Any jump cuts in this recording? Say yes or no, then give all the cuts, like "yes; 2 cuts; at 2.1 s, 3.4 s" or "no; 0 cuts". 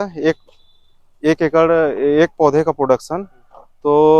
no; 0 cuts